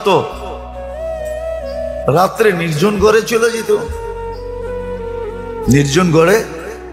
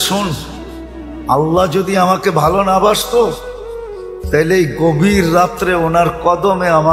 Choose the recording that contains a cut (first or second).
first